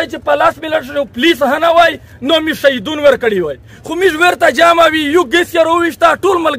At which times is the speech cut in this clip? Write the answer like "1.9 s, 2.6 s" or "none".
none